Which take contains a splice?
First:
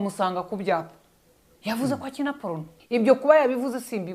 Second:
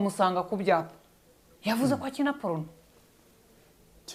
first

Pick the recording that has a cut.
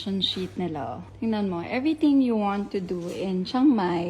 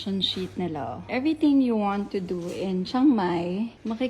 second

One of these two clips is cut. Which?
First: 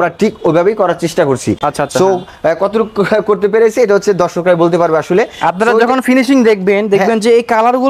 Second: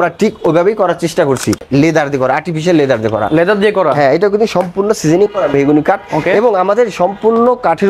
second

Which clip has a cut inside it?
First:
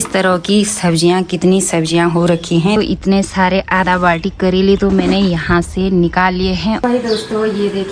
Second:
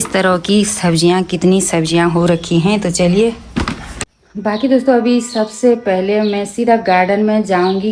first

